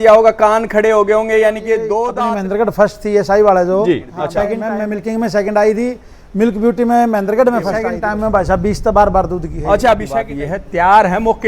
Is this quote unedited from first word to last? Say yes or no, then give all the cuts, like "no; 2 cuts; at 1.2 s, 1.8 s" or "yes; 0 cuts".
no; 4 cuts; at 2.1 s, 4.5 s, 7.9 s, 10.2 s